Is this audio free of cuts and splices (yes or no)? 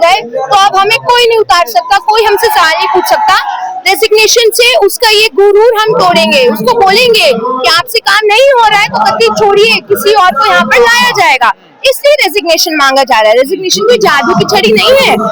yes